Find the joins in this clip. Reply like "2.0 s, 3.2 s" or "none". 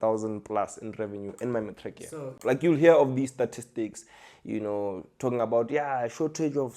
2.4 s